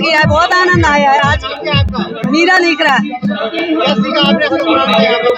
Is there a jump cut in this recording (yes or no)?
no